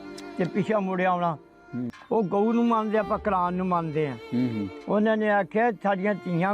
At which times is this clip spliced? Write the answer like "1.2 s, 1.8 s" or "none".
2.0 s